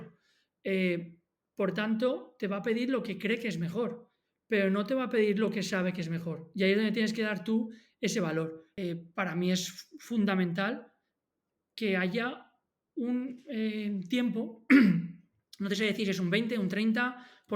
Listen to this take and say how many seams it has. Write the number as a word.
one